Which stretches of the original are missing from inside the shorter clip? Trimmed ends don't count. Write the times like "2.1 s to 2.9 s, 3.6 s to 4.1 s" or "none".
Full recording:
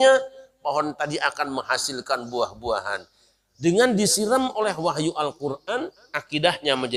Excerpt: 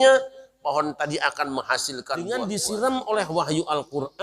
2.2 s to 3.7 s